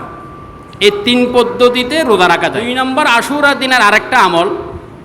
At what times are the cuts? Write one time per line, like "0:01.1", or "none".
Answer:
0:02.7